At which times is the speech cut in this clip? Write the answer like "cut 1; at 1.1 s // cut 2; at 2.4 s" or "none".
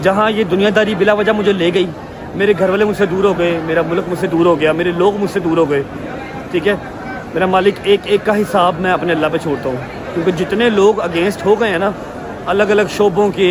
none